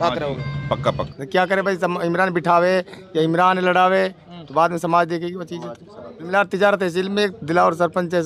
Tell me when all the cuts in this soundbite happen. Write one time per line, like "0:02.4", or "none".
0:01.1
0:06.3